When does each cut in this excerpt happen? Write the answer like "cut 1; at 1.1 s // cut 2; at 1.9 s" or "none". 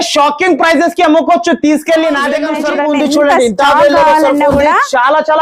cut 1; at 2.5 s